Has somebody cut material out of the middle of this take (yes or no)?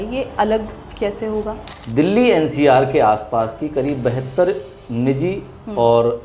yes